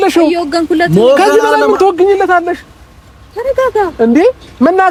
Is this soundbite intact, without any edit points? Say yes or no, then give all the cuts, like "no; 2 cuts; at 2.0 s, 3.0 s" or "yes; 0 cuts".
yes; 0 cuts